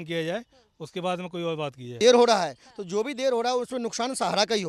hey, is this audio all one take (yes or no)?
no